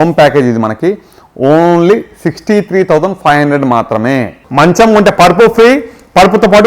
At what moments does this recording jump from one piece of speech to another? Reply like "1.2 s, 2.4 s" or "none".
4.4 s